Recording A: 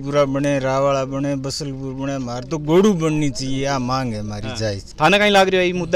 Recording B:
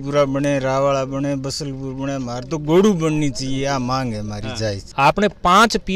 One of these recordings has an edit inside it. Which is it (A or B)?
B